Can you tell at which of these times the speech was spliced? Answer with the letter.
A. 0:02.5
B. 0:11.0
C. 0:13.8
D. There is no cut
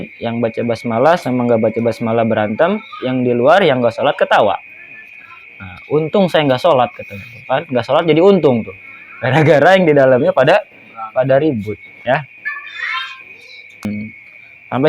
C